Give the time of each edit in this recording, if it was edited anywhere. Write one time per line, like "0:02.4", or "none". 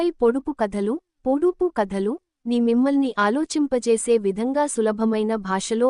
none